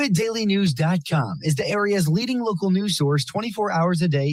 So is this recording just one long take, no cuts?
yes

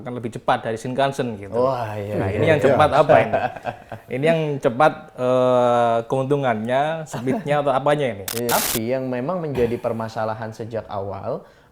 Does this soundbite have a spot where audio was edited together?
yes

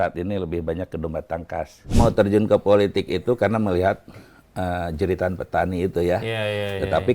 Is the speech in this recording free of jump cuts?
no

